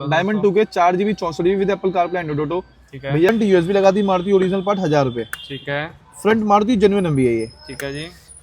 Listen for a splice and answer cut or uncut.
cut